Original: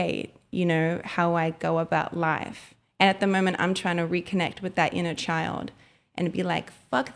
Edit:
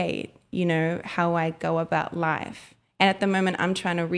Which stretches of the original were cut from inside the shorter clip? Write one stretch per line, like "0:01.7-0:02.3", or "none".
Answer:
none